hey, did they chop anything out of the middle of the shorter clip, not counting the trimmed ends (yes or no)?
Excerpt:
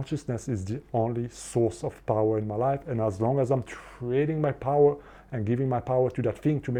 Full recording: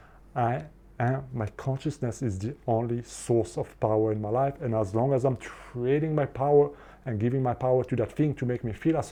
no